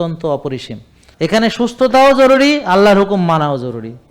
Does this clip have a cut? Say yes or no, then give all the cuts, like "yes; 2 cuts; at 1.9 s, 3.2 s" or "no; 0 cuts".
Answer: yes; 1 cut; at 1.0 s